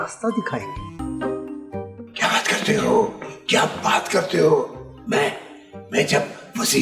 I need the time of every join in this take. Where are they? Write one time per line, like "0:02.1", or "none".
0:01.0

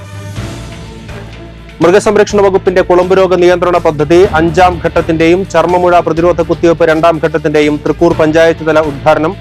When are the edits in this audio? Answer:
0:01.2

